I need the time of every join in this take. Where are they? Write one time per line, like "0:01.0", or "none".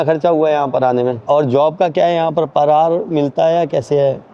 0:01.2